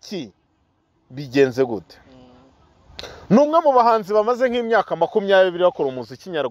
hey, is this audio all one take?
yes; 0 cuts

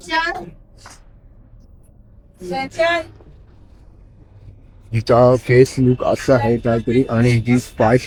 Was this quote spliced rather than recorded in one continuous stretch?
no; 0 cuts

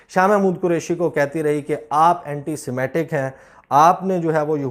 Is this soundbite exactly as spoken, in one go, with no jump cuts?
yes; 0 cuts

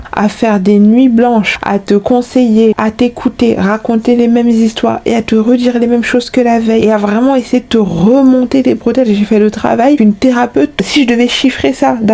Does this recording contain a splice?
yes; 1 cut; at 10.7 s

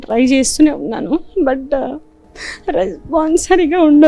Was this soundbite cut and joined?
no; 0 cuts

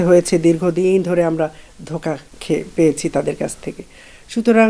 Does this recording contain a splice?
yes; 1 cut; at 2.3 s

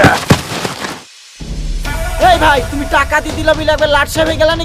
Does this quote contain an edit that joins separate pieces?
no; 0 cuts

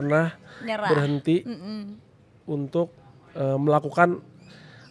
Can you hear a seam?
no; 0 cuts

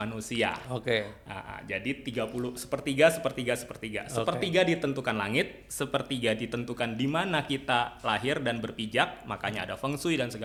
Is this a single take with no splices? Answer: yes; 0 cuts

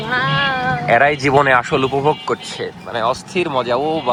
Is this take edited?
no; 0 cuts

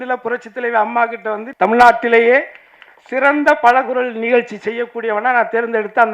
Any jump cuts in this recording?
yes; 1 cut; at 1.4 s

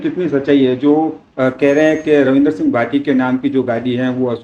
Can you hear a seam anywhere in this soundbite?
no; 0 cuts

